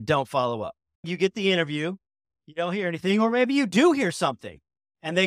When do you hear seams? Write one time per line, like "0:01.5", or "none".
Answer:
0:01.1
0:02.4